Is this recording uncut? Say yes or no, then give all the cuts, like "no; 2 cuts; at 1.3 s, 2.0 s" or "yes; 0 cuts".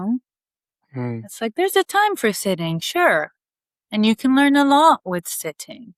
yes; 0 cuts